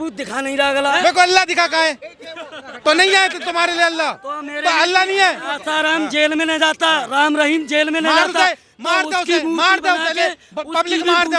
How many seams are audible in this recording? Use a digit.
2